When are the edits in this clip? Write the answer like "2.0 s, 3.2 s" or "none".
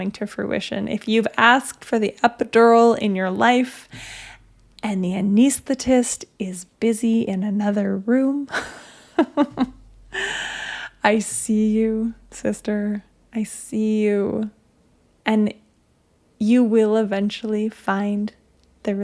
none